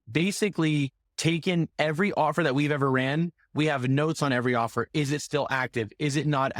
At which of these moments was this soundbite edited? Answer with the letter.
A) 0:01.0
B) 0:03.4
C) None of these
A